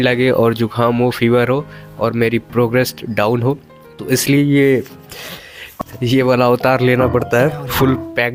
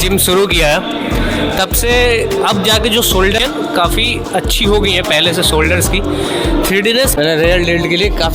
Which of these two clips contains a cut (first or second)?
second